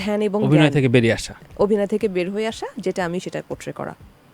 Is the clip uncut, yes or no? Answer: yes